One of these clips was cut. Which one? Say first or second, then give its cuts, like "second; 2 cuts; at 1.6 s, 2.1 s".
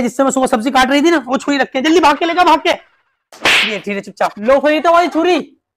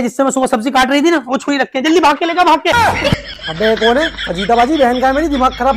second; 1 cut; at 2.7 s